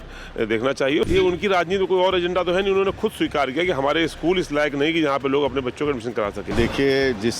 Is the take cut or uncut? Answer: cut